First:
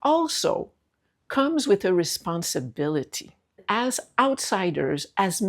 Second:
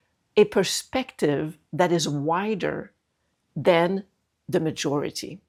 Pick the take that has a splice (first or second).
first